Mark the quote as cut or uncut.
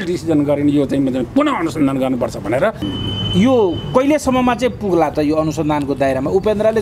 cut